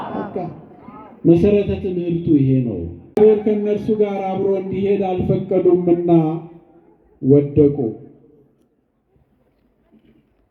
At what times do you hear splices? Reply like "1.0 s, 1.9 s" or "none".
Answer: 3.2 s

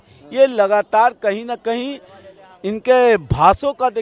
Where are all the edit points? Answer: none

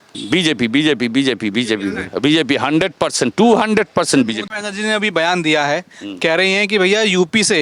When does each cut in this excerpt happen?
4.4 s

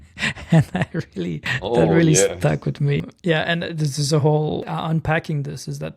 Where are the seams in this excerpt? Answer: 1.5 s, 3.0 s, 4.7 s

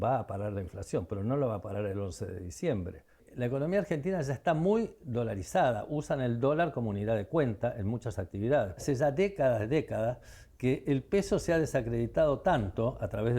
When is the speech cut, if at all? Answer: 3.3 s, 8.8 s

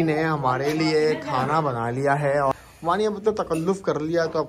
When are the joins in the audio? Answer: 2.6 s

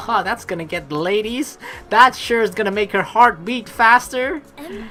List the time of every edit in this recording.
none

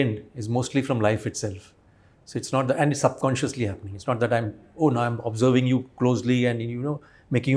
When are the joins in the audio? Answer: none

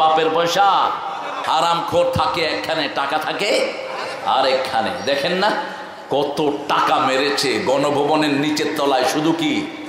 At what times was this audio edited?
1.4 s

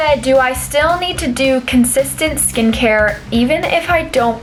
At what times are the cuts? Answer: none

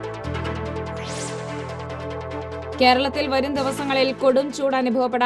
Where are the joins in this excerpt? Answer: 1.0 s, 2.2 s

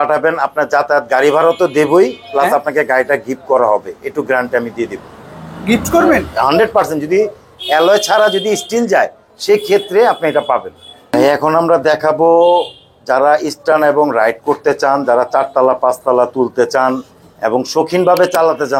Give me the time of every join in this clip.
none

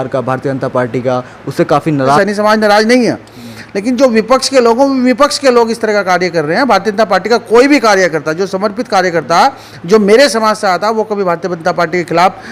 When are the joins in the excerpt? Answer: 2.2 s

